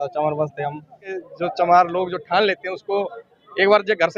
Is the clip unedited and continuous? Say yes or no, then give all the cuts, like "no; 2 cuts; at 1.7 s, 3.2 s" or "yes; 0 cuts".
no; 1 cut; at 1.1 s